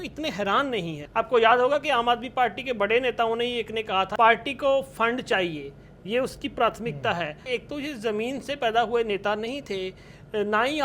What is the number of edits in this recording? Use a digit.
3